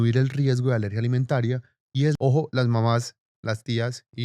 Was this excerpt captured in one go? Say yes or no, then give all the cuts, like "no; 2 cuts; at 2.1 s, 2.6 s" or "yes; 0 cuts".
no; 1 cut; at 2.1 s